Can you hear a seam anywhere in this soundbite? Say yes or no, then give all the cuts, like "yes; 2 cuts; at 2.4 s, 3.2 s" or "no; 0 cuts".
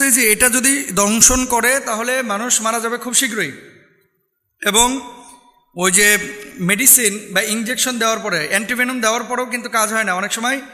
no; 0 cuts